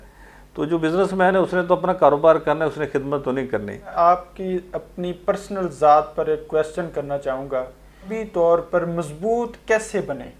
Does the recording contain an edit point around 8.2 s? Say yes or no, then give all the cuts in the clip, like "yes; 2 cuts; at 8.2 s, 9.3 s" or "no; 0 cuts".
yes; 2 cuts; at 3.9 s, 8.2 s